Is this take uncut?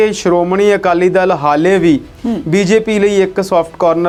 yes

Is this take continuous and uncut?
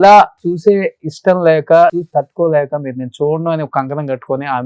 no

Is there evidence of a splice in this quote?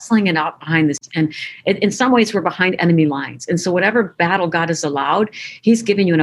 yes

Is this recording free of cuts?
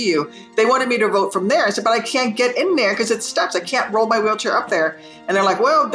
yes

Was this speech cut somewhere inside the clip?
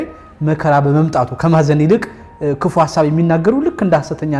no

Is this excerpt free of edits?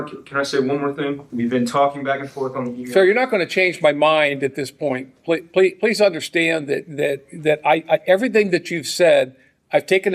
no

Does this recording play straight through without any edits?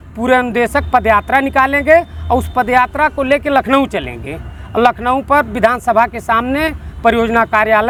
yes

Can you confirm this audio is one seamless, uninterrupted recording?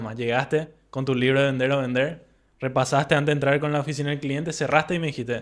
yes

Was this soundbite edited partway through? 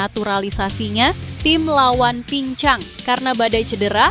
yes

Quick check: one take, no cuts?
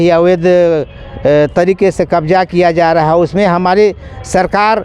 yes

